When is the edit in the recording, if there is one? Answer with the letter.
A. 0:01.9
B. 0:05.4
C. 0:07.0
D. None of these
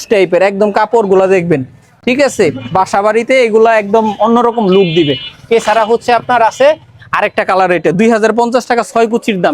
D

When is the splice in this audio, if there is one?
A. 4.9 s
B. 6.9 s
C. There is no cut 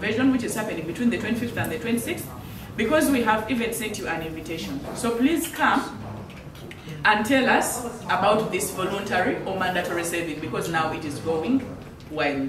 C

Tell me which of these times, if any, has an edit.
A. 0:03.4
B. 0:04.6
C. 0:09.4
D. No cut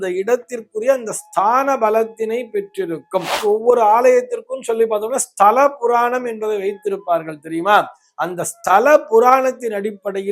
A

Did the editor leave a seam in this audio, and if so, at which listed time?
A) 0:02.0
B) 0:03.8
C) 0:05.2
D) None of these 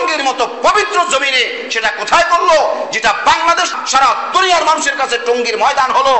B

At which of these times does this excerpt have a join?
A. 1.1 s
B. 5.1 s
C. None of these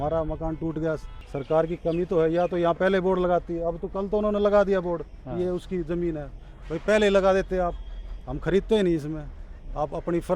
A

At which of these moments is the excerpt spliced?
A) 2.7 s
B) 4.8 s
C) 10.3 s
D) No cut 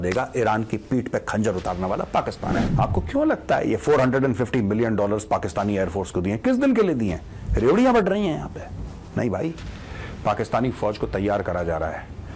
A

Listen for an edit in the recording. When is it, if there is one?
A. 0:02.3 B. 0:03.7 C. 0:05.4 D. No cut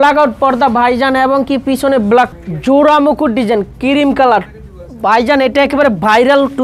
A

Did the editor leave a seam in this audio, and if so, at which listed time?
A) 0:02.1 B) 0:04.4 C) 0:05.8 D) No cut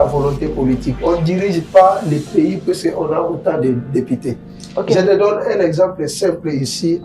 D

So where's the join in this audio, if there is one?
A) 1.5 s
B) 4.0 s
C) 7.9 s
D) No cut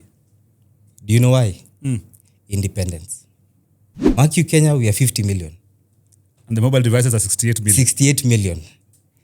B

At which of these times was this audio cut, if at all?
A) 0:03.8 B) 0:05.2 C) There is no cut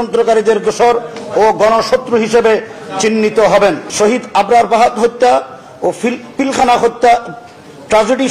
A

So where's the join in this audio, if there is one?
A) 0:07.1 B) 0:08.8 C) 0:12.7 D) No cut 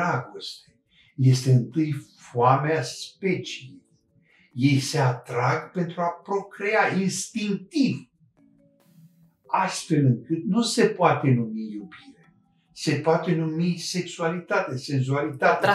D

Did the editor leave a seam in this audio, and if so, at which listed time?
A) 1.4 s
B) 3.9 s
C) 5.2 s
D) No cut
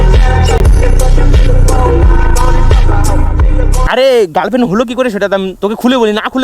B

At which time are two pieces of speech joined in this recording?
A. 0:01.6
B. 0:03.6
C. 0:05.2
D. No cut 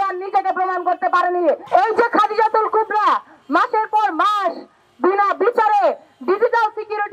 A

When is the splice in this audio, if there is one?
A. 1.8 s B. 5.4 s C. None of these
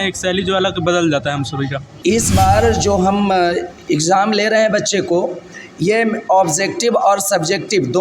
A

